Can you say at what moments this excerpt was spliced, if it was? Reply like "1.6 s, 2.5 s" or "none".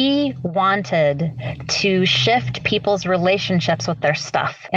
none